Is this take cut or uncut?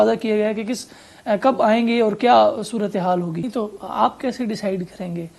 cut